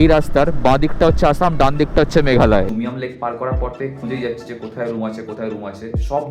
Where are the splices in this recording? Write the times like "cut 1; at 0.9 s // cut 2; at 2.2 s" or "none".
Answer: cut 1; at 2.7 s